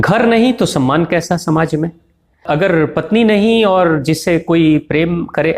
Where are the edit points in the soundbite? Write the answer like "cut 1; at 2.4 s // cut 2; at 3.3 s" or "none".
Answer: cut 1; at 2.4 s

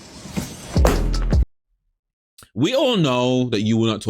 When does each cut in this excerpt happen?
cut 1; at 1.4 s

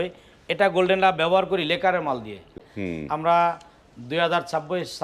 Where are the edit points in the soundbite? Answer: cut 1; at 2.5 s

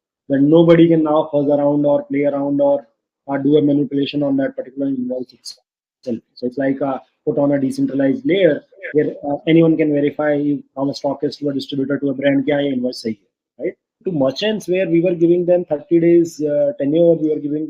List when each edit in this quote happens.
cut 1; at 14.0 s

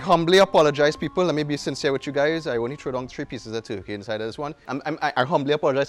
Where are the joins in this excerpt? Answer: cut 1; at 4.6 s

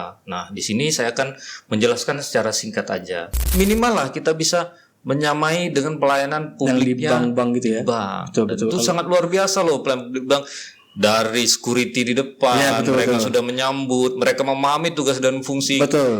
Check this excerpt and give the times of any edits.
cut 1; at 3.4 s

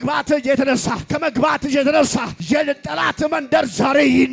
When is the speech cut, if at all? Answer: cut 1; at 1.0 s // cut 2; at 2.3 s

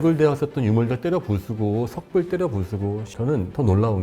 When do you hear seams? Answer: cut 1; at 3.1 s

